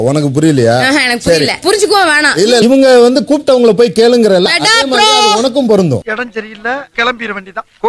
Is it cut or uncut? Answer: uncut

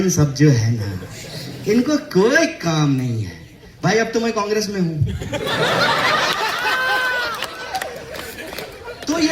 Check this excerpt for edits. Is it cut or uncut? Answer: uncut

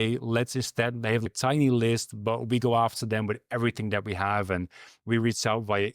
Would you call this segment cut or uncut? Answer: cut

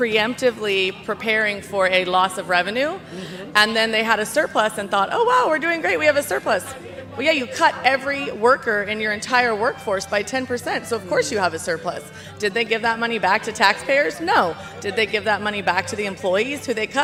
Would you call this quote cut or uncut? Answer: uncut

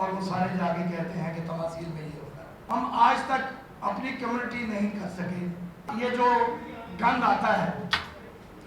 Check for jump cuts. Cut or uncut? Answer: cut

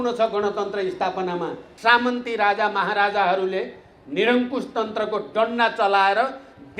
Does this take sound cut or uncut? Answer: cut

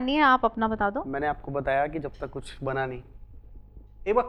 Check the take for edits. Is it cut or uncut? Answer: uncut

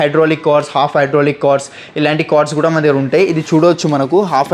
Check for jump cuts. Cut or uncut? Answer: uncut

